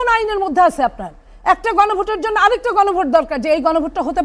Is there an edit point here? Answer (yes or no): no